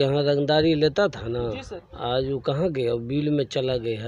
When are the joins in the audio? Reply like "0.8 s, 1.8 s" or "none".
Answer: none